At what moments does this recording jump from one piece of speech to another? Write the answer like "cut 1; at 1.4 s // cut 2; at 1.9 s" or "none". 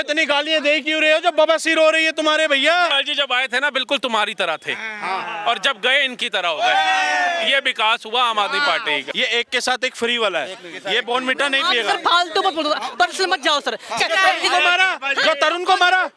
cut 1; at 2.9 s // cut 2; at 9.1 s // cut 3; at 14.0 s